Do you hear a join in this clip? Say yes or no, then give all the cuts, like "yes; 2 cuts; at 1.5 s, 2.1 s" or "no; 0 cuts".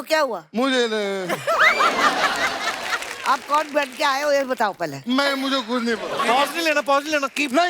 yes; 2 cuts; at 3.0 s, 6.2 s